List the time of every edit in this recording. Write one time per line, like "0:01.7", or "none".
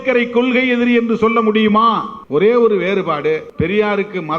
0:02.1
0:03.5